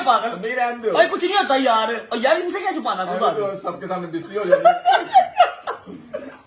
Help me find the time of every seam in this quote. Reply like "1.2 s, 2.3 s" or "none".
none